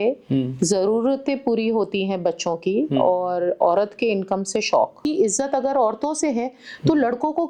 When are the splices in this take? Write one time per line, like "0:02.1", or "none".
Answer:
0:05.0